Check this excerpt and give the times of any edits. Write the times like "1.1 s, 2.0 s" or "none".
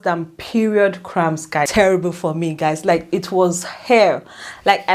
1.7 s